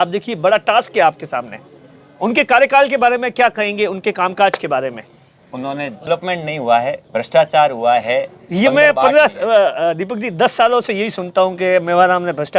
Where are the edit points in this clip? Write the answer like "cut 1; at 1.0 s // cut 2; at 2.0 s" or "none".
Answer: cut 1; at 6.1 s